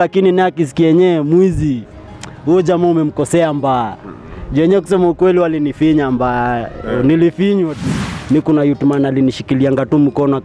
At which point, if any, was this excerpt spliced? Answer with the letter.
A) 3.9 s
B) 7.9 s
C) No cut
B